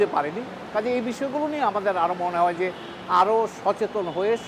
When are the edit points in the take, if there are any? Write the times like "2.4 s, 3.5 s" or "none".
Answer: none